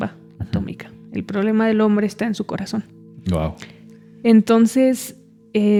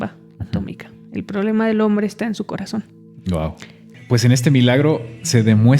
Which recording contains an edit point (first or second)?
second